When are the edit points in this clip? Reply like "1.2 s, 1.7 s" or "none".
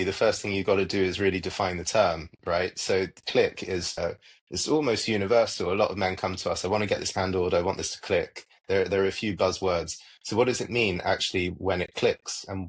4.0 s